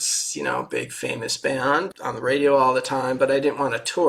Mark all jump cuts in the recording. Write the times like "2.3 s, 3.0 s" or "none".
1.9 s